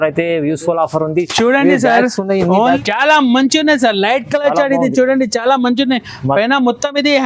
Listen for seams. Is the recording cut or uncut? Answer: cut